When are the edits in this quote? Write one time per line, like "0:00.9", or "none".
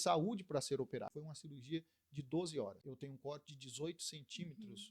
0:01.2
0:02.9